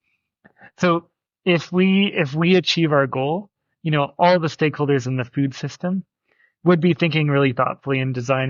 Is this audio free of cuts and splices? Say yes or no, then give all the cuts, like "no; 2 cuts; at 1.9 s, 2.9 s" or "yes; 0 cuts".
yes; 0 cuts